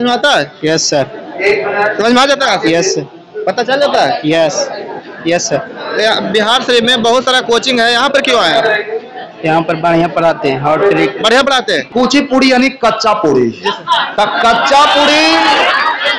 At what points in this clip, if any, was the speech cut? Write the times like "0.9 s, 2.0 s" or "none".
11.9 s